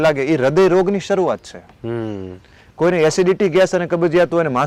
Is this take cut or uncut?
uncut